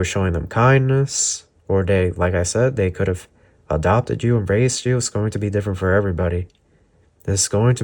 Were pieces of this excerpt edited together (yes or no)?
no